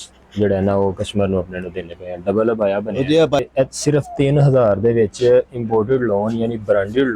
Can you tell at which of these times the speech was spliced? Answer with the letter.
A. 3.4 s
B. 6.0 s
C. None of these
A